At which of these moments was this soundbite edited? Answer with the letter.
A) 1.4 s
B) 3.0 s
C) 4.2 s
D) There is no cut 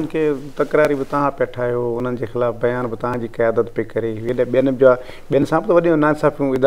D